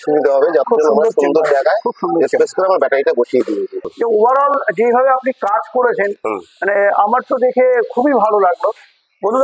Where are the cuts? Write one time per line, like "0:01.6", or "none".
0:03.9

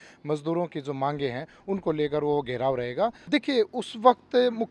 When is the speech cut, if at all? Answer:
0:03.2

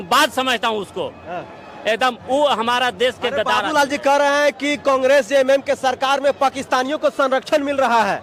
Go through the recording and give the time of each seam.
none

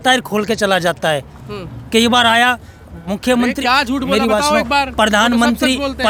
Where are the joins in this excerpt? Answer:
none

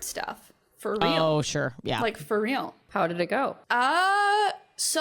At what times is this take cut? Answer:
0:02.8
0:03.6

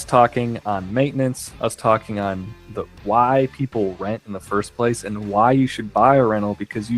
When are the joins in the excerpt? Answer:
none

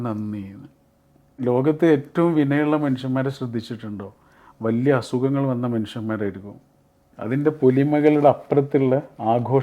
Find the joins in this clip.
0:01.4
0:07.1

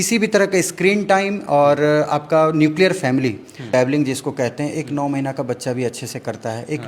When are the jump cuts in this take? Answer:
0:03.6

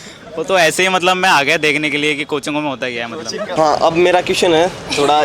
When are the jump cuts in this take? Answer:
0:03.5

